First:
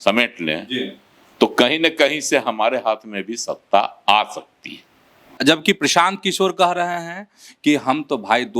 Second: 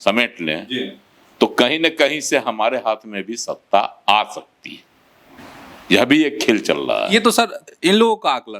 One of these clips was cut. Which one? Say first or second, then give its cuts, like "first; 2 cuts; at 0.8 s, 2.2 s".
first; 1 cut; at 5.4 s